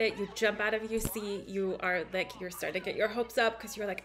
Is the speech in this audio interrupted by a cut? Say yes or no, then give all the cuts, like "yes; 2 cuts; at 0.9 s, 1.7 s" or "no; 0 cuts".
no; 0 cuts